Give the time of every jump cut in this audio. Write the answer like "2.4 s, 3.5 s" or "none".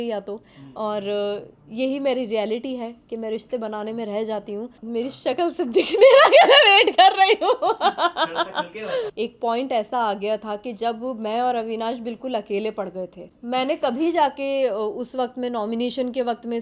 4.8 s, 9.1 s, 13.3 s